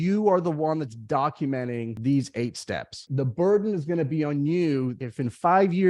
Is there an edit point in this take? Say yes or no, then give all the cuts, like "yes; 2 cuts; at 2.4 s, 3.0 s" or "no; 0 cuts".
yes; 3 cuts; at 1.9 s, 3.1 s, 5.0 s